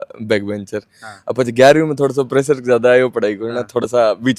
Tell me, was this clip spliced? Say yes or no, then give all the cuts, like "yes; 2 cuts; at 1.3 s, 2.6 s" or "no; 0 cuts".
no; 0 cuts